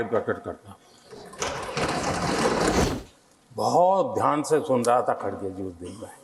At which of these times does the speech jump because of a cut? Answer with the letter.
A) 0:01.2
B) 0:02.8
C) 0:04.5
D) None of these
B